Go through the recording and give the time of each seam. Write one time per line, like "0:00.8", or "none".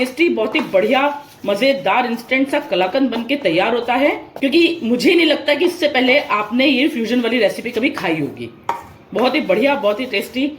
0:04.3